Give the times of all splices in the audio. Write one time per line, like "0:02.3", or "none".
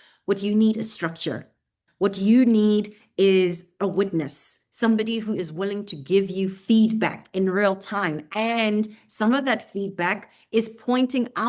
0:01.8